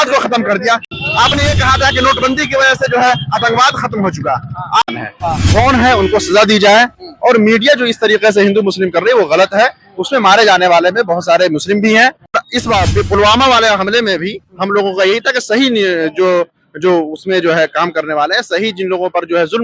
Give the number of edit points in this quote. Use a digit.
3